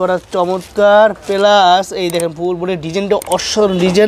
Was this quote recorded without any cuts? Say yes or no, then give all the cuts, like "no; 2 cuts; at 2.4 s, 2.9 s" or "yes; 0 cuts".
yes; 0 cuts